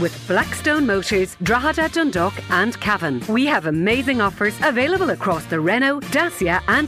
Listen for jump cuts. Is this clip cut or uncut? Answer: uncut